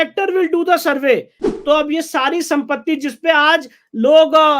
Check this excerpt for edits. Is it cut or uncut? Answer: cut